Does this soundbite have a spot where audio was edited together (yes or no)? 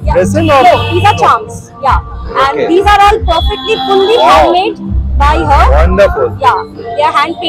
no